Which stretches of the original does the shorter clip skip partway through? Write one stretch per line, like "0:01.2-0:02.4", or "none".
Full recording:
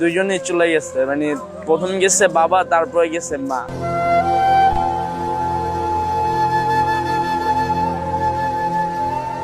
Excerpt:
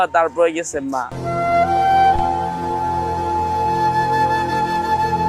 none